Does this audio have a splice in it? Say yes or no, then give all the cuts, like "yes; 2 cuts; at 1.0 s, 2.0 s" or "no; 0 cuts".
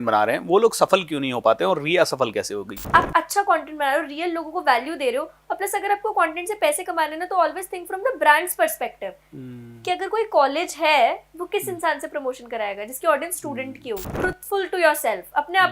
yes; 2 cuts; at 2.8 s, 14.1 s